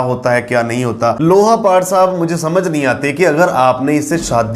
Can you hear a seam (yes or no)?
yes